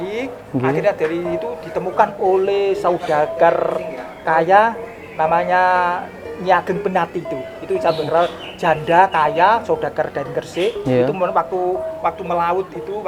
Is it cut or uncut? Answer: uncut